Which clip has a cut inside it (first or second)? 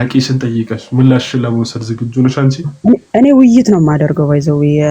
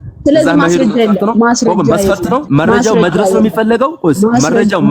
second